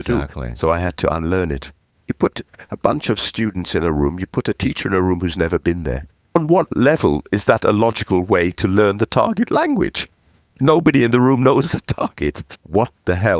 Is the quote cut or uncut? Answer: cut